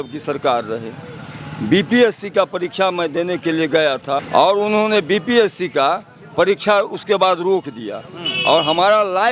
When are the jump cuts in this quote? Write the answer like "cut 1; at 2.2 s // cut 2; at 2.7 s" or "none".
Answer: cut 1; at 4.2 s